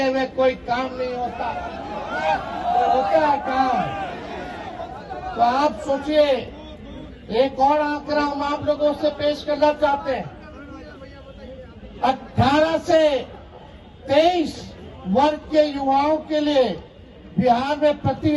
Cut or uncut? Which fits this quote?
uncut